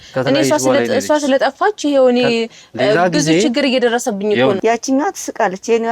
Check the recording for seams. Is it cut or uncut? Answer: cut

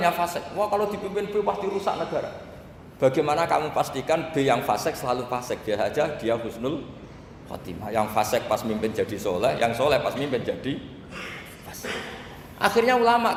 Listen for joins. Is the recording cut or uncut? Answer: uncut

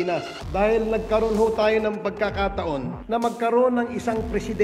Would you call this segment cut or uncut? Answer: uncut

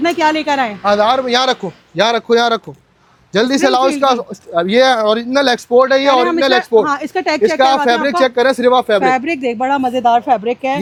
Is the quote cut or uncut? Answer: uncut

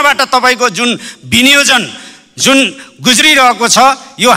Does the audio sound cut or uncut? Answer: uncut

